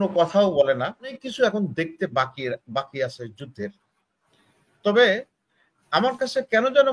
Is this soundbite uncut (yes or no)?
no